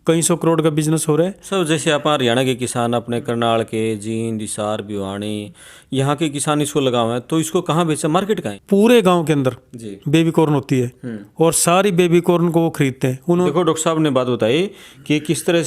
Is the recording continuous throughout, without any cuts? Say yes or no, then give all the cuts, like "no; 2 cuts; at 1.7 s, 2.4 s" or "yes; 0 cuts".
no; 3 cuts; at 1.5 s, 8.5 s, 13.5 s